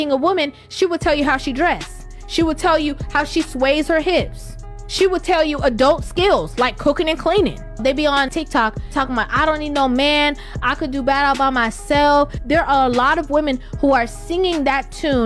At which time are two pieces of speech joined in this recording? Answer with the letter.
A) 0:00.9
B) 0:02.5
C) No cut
C